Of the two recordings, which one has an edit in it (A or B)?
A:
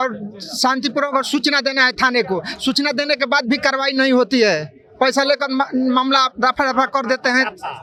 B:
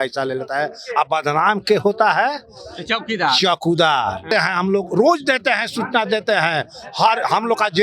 B